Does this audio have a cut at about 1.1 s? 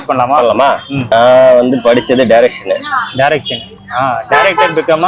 yes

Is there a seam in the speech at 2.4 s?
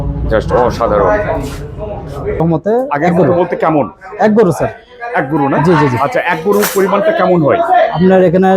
yes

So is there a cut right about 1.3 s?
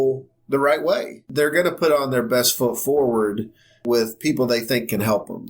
yes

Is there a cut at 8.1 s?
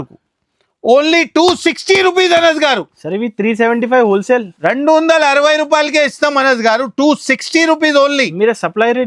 no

